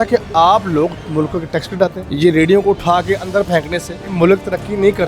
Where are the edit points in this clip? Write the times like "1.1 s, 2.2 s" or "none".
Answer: 2.0 s, 4.0 s